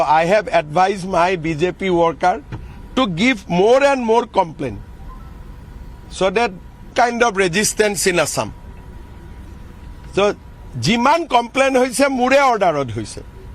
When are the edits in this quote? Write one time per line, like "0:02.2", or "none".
none